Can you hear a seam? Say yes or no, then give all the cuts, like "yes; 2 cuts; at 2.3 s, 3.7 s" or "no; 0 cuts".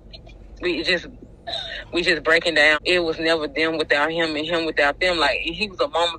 yes; 1 cut; at 2.8 s